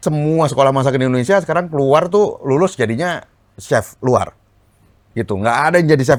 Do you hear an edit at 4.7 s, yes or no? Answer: no